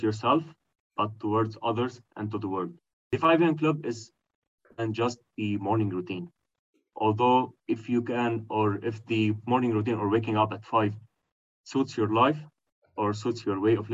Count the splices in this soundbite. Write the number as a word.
one